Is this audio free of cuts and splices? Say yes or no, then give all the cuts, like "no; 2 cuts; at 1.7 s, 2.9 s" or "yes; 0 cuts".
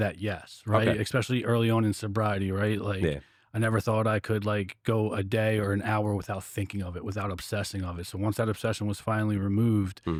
yes; 0 cuts